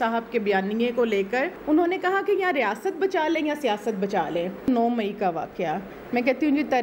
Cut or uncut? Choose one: cut